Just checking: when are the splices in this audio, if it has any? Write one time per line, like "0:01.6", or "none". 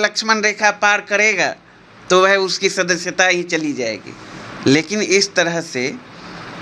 none